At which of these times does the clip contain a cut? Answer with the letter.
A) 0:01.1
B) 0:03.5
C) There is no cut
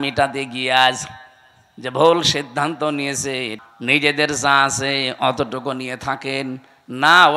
B